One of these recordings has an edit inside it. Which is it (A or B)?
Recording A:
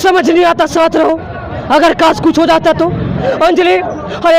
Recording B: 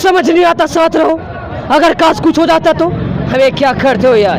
A